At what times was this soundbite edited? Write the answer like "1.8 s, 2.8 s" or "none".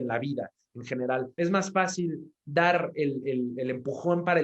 1.3 s